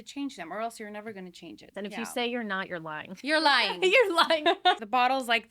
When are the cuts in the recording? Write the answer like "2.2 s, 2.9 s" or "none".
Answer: 1.6 s, 4.8 s